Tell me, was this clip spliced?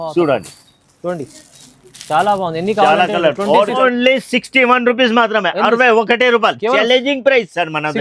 yes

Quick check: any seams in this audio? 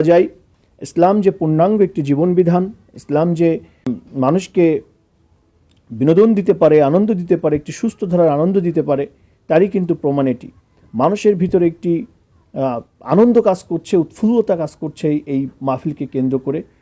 yes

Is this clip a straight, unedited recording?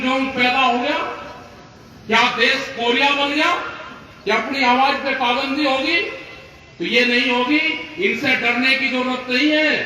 yes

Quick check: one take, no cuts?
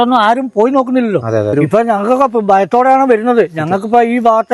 no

